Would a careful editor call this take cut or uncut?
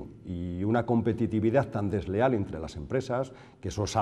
uncut